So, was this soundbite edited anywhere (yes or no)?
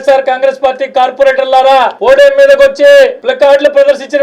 yes